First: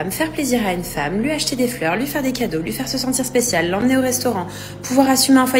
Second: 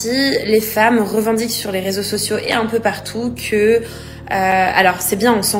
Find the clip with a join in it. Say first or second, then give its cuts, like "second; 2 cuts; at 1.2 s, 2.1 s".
first; 1 cut; at 4.0 s